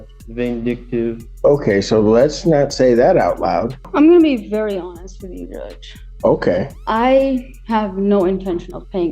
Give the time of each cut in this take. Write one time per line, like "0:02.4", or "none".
0:01.3
0:03.8
0:06.8